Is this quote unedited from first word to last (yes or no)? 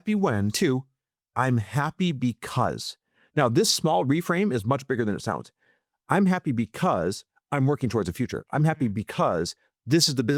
yes